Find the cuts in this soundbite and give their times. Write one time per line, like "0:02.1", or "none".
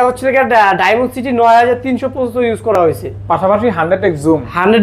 none